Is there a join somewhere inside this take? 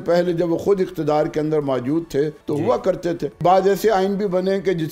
yes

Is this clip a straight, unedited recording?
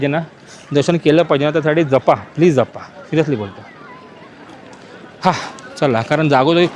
yes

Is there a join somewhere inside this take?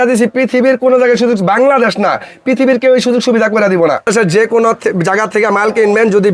yes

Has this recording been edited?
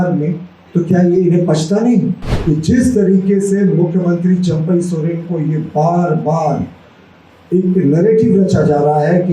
yes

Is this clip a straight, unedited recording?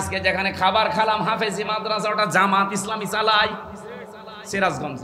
yes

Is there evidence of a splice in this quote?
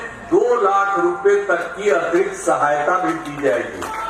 no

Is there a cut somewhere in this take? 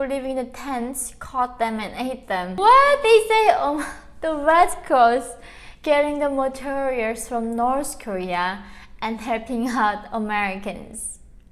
yes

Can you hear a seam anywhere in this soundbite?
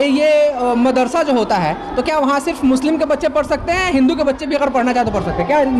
no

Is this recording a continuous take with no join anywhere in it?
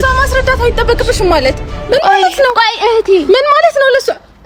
yes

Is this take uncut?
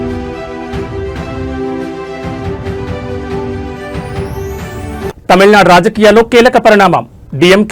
yes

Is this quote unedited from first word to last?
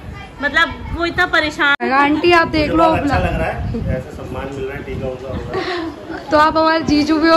no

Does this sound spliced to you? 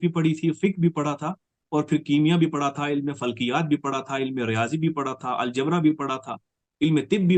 no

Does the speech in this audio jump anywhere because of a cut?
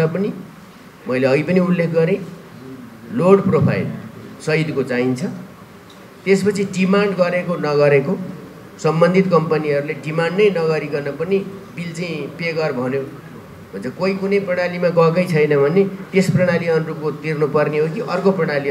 no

